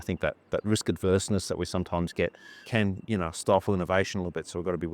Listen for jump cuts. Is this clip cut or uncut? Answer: cut